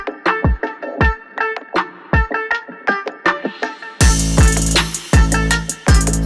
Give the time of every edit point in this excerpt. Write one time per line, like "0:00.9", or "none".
none